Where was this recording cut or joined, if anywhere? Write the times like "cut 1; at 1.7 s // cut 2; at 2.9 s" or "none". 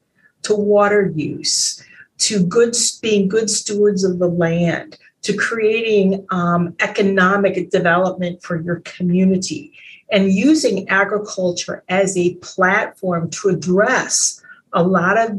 none